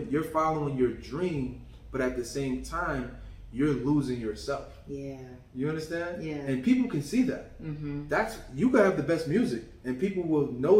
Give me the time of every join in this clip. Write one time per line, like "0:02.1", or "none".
none